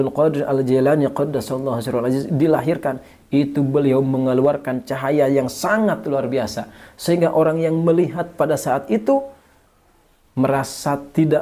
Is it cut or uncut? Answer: uncut